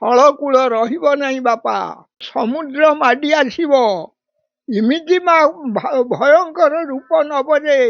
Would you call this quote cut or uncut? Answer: cut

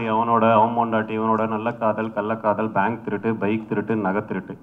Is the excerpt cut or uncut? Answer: uncut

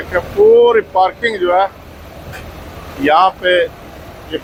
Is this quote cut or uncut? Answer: uncut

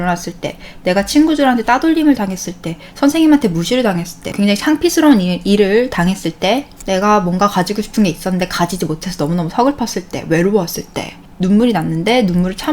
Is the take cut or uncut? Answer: cut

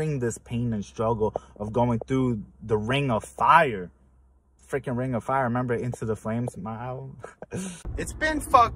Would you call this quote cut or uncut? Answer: cut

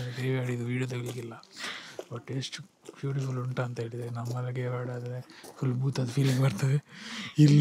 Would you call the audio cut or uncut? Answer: uncut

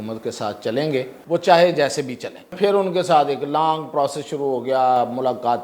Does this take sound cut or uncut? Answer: cut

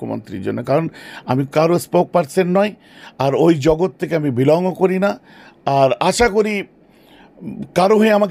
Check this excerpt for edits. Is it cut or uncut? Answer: uncut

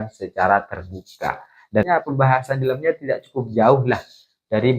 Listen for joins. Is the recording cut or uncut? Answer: cut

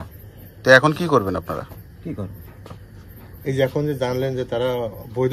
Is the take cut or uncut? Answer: uncut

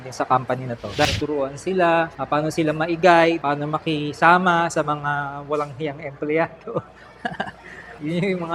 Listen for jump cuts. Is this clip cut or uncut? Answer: cut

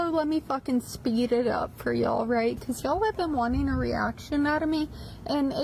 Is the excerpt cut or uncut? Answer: cut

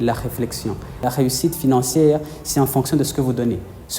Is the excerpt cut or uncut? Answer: cut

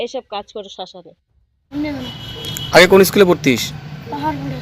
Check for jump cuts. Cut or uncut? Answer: cut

